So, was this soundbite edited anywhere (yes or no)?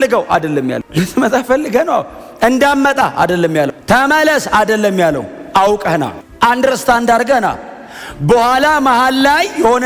yes